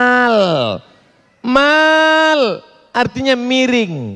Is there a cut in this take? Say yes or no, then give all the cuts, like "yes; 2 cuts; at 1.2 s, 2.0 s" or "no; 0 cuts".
no; 0 cuts